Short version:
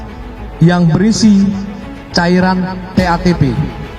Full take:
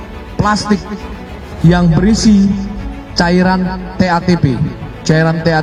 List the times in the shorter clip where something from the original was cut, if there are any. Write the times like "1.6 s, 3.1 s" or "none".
none